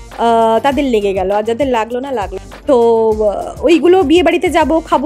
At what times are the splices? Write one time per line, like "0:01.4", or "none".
0:02.4